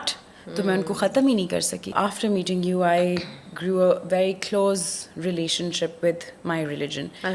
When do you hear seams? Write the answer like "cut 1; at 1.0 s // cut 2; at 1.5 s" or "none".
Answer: cut 1; at 1.9 s